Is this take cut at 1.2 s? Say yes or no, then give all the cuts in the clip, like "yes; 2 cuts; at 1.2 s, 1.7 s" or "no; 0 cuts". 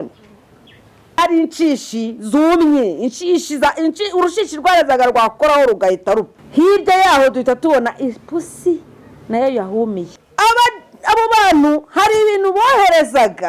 yes; 3 cuts; at 1.2 s, 6.4 s, 10.0 s